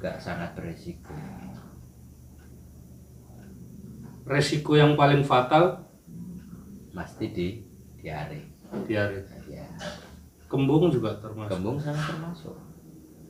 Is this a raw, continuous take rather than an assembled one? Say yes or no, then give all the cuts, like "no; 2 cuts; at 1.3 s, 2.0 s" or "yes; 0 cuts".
yes; 0 cuts